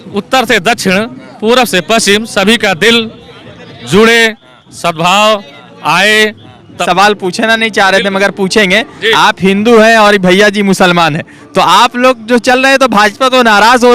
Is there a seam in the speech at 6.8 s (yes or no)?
yes